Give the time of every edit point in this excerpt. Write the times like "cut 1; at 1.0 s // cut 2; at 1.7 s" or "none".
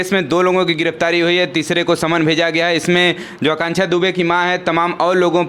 none